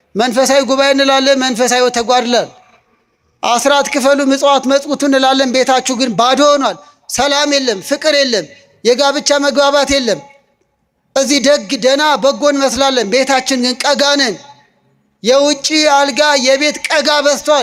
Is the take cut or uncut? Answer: uncut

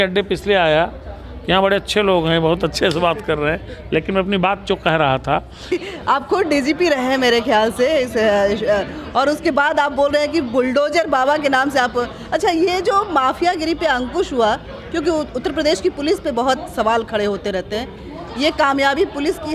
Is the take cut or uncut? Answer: cut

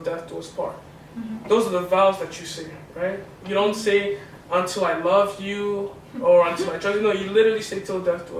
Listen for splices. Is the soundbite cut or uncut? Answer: uncut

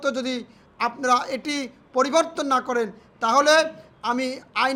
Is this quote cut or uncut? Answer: uncut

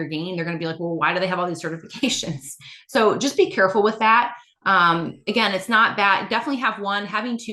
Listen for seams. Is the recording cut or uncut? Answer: uncut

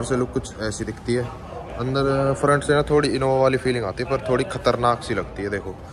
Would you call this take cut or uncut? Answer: uncut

